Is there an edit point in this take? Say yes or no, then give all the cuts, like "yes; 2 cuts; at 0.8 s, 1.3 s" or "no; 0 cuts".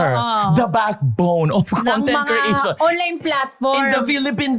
no; 0 cuts